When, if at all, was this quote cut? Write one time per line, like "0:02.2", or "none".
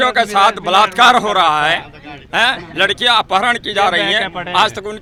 none